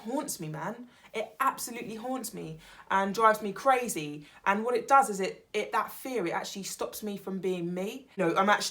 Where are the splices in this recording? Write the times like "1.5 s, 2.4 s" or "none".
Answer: none